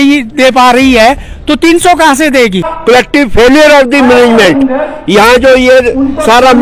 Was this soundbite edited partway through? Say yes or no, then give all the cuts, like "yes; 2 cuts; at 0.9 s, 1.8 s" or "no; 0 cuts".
yes; 1 cut; at 2.7 s